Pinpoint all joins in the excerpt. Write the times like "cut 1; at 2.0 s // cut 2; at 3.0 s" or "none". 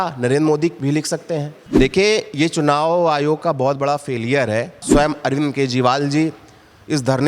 cut 1; at 1.6 s // cut 2; at 4.8 s